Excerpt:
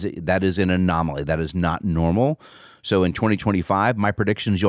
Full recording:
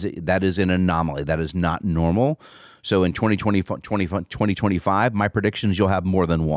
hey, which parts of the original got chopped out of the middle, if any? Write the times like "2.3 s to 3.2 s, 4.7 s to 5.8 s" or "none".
3.4 s to 4.6 s

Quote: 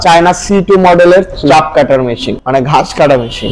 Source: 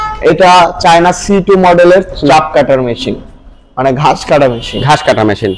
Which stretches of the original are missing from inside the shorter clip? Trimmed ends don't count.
3.1 s to 3.6 s

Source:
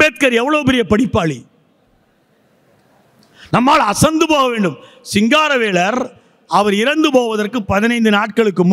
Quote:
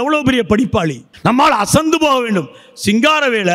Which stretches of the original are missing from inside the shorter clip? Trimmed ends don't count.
1.5 s to 3.3 s

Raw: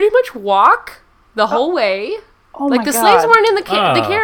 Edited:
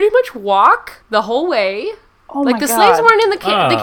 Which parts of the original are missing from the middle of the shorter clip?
0.9 s to 1.2 s

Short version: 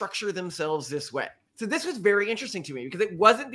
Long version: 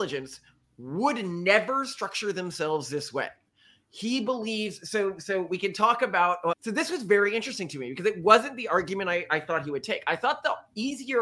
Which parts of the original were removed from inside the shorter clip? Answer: 3.6 s to 6.6 s

